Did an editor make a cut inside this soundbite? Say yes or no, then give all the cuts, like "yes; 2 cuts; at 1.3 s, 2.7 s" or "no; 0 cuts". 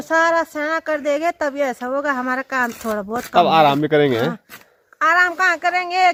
no; 0 cuts